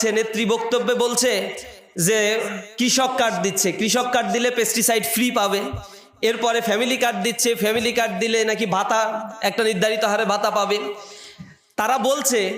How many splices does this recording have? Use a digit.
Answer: 0